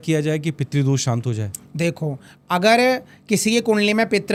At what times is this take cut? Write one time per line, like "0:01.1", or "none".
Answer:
none